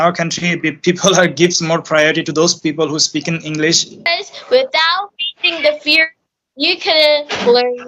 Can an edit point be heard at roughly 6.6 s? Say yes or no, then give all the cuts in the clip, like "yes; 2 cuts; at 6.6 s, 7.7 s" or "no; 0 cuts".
no; 1 cut; at 4.1 s